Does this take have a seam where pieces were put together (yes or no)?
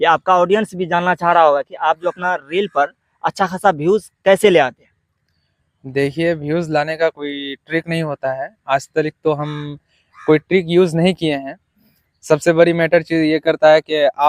no